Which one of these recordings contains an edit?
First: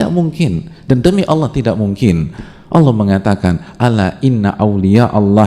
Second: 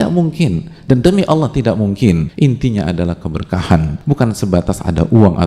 second; 2 cuts; at 2.3 s, 4.0 s

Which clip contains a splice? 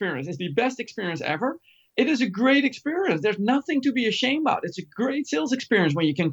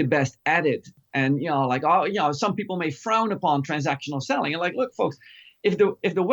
second; 1 cut; at 0.9 s

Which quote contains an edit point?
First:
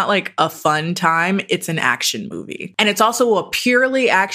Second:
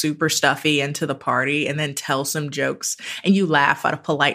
first; 1 cut; at 2.6 s

